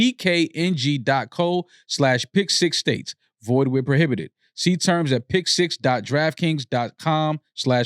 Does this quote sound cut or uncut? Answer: uncut